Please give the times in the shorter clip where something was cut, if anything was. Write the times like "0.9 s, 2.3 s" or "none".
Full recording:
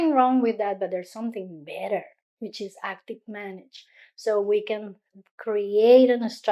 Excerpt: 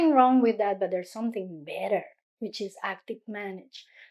none